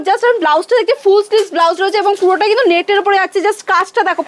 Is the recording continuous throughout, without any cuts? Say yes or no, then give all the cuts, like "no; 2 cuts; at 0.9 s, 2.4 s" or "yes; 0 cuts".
yes; 0 cuts